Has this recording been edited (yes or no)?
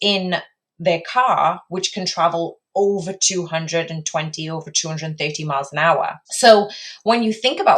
yes